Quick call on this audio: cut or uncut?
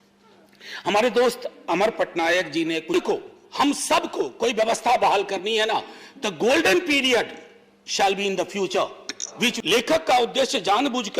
cut